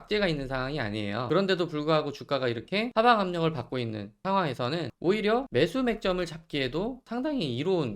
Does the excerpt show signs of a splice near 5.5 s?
yes; 6 cuts; at 1.2 s, 2.9 s, 4.1 s, 4.9 s, 5.5 s, 7.0 s

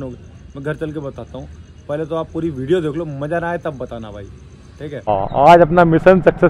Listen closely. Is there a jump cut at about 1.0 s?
no; 1 cut; at 5.1 s

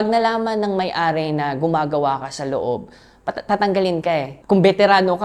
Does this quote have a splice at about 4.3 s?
yes; 1 cut; at 4.3 s

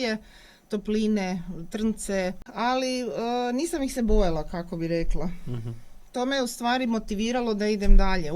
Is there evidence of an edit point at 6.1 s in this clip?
no; 1 cut; at 2.4 s

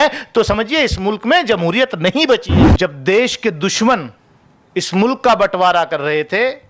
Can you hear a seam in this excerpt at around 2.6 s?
yes; 1 cut; at 2.6 s

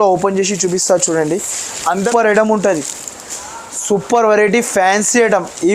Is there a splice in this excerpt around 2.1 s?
yes; 1 cut; at 2.1 s

